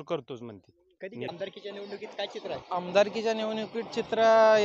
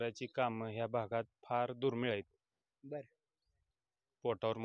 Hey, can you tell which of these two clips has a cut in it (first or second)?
first